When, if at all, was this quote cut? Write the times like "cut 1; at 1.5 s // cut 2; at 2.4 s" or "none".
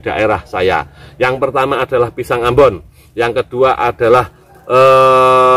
none